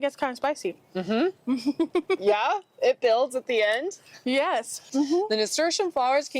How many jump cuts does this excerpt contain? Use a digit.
1